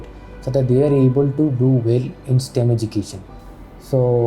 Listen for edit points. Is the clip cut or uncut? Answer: uncut